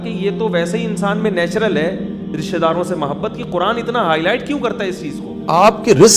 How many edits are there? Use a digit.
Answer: 1